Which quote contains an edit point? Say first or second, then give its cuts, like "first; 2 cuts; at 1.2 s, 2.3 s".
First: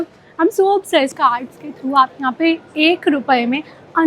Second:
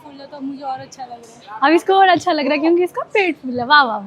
first; 1 cut; at 1.2 s